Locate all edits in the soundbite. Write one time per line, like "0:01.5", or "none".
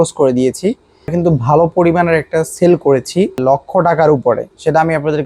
0:01.1
0:03.4